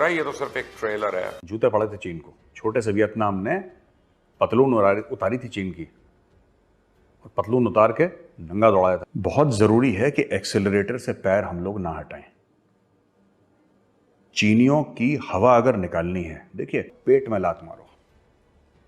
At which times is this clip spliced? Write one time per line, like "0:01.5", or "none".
0:01.4
0:09.1
0:16.9